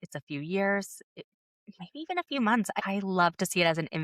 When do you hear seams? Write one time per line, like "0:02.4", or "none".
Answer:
0:02.9